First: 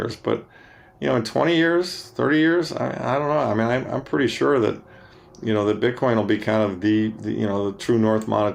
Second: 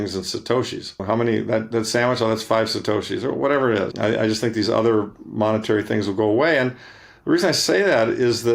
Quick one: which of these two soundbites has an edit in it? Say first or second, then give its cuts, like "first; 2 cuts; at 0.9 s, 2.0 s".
second; 2 cuts; at 1.0 s, 3.9 s